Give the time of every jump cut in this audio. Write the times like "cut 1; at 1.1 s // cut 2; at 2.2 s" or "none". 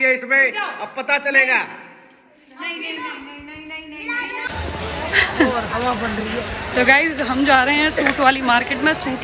cut 1; at 4.5 s

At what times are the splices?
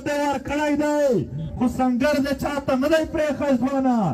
none

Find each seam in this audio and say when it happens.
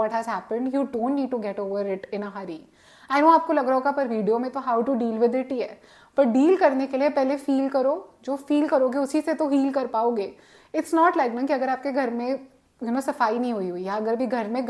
none

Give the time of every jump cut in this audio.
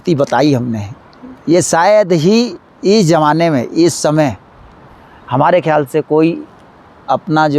none

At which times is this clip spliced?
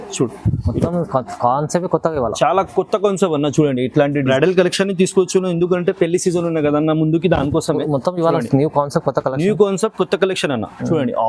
cut 1; at 4.3 s

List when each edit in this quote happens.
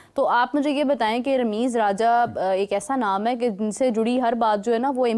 none

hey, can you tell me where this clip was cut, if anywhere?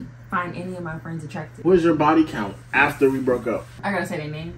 cut 1; at 1.5 s // cut 2; at 3.7 s

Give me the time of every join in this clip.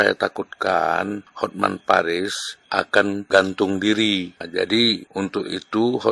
cut 1; at 1.2 s // cut 2; at 2.9 s // cut 3; at 4.4 s // cut 4; at 5.1 s

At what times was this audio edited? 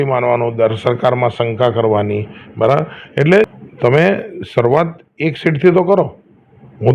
cut 1; at 3.5 s

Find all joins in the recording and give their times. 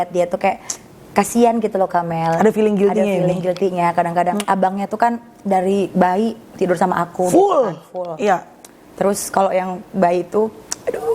cut 1; at 4.4 s

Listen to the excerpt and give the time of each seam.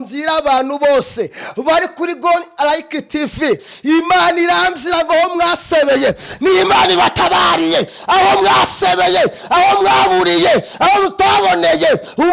none

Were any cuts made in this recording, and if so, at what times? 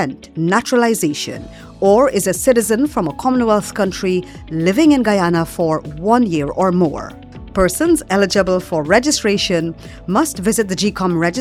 none

